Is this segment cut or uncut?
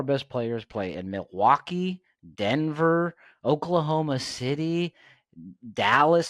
uncut